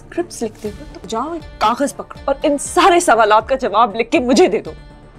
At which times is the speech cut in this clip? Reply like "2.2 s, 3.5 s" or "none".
0.9 s, 2.1 s